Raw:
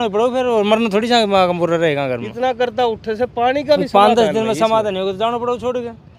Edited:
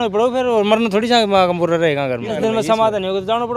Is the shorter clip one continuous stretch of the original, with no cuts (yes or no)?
no